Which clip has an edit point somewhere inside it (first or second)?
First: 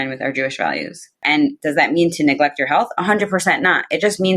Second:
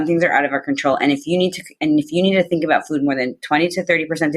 first